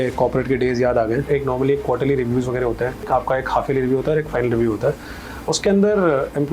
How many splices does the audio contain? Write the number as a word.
two